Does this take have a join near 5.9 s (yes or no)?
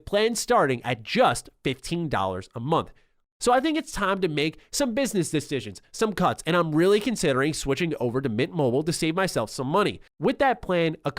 no